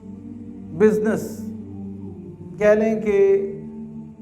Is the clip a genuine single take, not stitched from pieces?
no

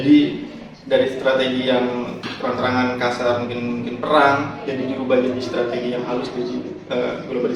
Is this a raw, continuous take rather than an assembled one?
yes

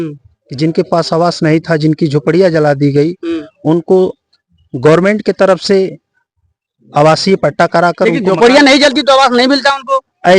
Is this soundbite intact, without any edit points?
yes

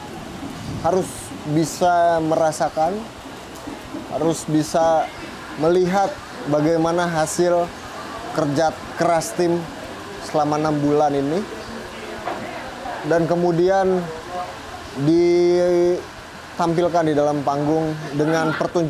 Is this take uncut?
yes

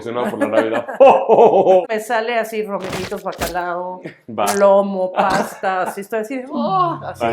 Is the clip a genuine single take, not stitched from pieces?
no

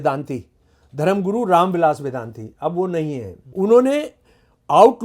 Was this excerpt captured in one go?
no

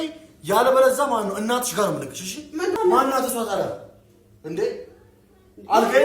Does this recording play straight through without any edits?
no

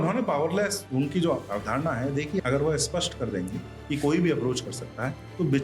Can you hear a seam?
yes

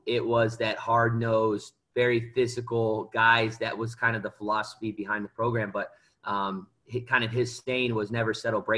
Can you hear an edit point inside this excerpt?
no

